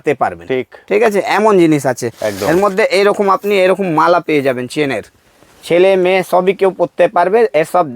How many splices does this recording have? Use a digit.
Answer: 0